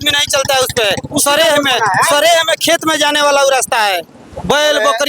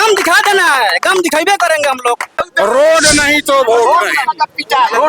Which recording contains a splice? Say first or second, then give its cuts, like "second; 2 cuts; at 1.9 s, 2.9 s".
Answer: second; 1 cut; at 2.5 s